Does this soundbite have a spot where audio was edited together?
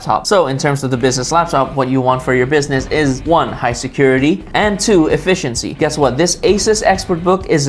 yes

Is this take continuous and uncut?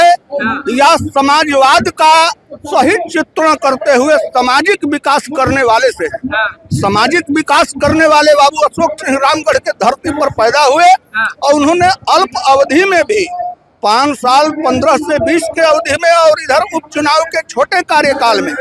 yes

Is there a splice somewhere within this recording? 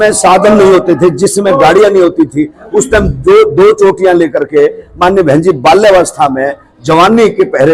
no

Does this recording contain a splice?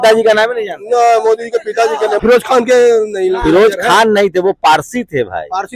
yes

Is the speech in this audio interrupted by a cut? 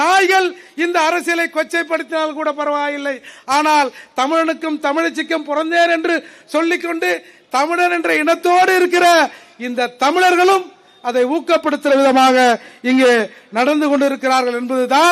no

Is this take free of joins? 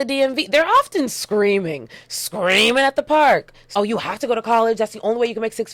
no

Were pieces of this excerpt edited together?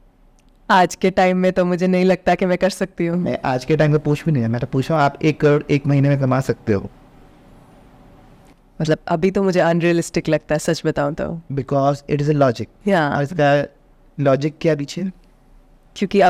no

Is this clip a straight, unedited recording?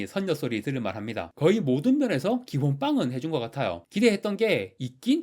no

